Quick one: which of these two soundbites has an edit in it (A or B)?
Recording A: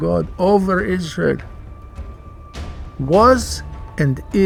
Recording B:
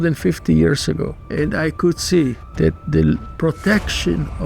B